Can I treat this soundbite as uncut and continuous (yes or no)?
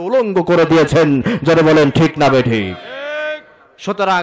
yes